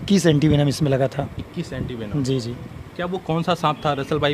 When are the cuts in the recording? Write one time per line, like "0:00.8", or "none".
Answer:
none